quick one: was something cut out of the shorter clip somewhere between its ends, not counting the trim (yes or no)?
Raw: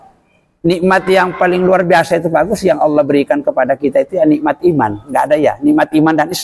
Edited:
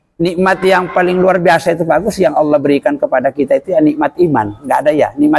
no